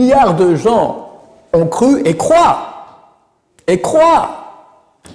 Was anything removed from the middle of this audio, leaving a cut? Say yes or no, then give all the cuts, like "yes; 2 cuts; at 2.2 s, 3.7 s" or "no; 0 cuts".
no; 0 cuts